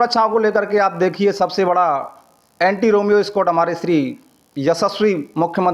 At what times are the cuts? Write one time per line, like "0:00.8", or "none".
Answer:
none